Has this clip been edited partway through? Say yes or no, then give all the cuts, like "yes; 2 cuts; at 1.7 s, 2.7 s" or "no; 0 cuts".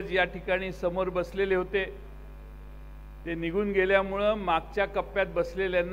no; 0 cuts